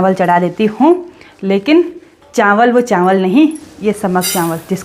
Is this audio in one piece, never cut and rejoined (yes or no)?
yes